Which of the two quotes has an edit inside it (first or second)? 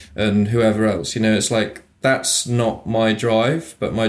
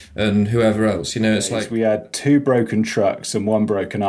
second